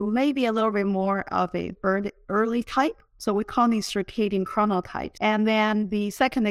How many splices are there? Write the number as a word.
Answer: two